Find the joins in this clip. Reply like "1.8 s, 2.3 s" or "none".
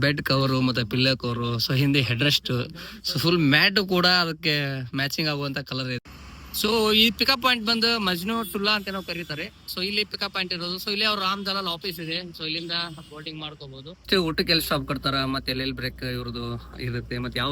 6.0 s, 14.1 s